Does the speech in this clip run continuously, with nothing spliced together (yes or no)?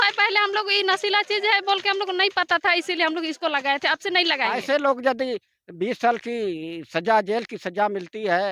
no